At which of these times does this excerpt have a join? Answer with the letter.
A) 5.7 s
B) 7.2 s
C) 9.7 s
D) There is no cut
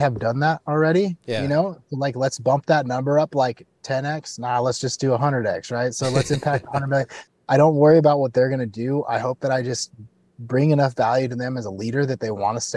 B